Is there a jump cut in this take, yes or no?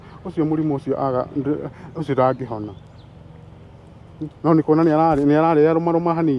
no